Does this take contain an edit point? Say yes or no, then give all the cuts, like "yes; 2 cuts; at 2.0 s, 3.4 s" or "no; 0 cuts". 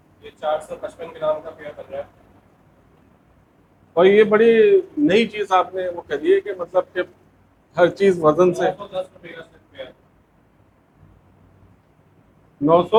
no; 0 cuts